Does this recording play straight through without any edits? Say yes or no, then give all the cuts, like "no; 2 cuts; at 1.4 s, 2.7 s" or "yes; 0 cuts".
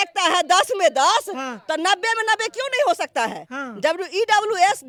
yes; 0 cuts